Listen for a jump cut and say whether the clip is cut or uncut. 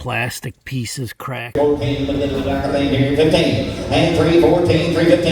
cut